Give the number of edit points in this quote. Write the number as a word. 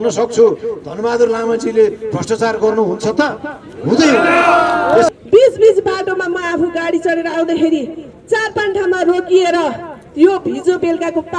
one